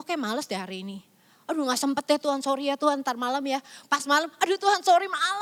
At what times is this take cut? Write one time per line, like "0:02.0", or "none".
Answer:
none